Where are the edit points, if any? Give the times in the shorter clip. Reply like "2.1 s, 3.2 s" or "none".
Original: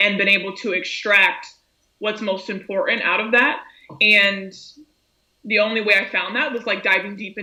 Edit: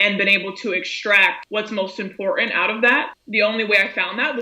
1.4 s, 3.2 s